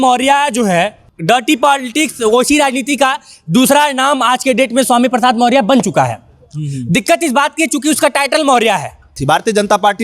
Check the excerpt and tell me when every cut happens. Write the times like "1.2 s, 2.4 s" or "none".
1.1 s, 9.1 s